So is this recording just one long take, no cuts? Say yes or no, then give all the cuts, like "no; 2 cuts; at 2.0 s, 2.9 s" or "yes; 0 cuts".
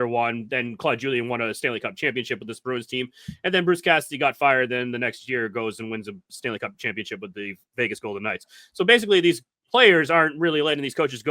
no; 1 cut; at 6.3 s